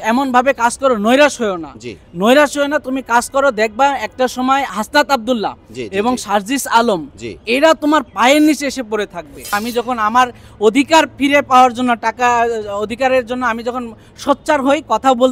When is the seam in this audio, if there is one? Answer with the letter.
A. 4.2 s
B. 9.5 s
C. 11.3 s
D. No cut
B